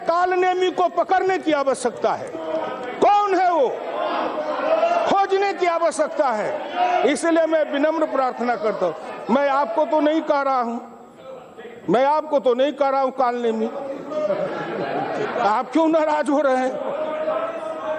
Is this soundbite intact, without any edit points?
yes; 0 cuts

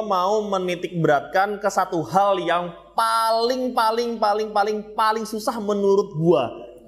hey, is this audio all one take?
yes; 0 cuts

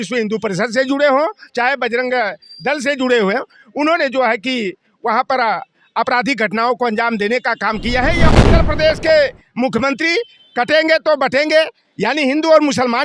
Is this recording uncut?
no; 1 cut; at 8.3 s

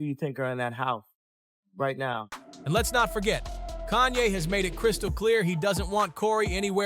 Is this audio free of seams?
yes; 0 cuts

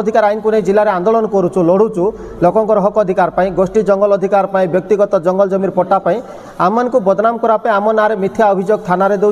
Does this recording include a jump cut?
no; 0 cuts

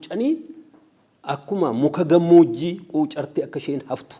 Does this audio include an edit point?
no; 0 cuts

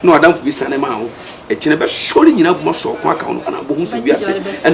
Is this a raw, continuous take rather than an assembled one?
yes; 0 cuts

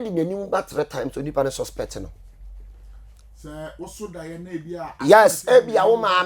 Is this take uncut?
yes; 0 cuts

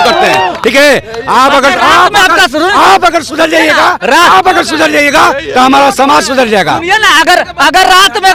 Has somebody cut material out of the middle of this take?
no; 0 cuts

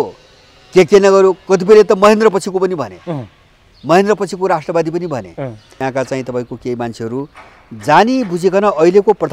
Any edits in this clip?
yes; 1 cut; at 5.8 s

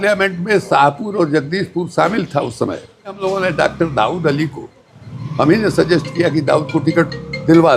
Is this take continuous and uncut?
no; 1 cut; at 3.2 s

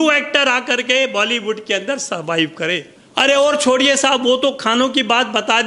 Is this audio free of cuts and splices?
yes; 0 cuts

